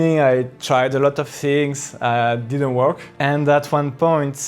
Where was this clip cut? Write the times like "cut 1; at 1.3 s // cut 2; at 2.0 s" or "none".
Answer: cut 1; at 3.1 s